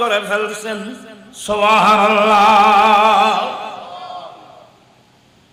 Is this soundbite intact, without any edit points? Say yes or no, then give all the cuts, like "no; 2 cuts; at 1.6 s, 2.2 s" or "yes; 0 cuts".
yes; 0 cuts